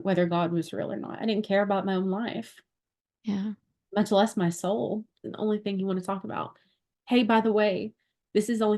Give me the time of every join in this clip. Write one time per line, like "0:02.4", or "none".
0:05.2